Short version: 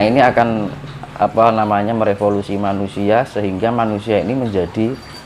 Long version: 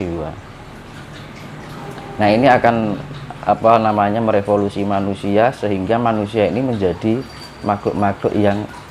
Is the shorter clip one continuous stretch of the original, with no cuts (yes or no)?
yes